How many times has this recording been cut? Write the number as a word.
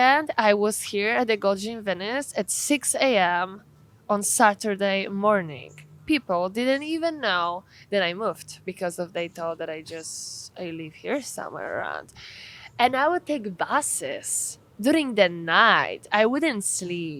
zero